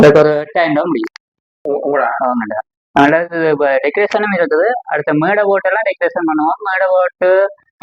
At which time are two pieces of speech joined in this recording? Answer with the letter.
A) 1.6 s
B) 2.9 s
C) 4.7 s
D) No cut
A